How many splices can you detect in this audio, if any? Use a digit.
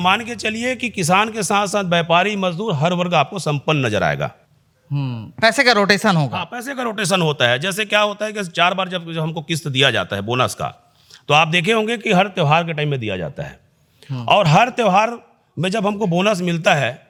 0